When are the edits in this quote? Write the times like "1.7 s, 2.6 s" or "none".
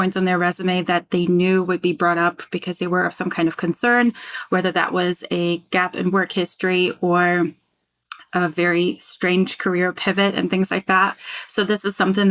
none